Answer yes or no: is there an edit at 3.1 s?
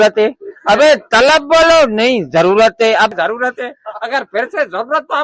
yes